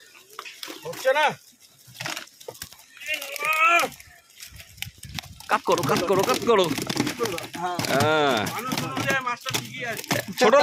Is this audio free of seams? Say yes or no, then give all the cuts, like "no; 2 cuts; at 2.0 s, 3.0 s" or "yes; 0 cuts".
yes; 0 cuts